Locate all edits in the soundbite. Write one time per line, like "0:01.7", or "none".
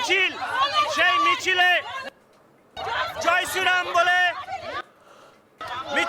0:01.0